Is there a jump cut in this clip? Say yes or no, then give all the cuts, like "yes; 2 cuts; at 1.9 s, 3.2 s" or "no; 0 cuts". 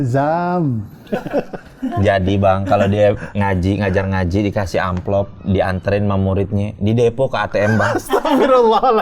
no; 0 cuts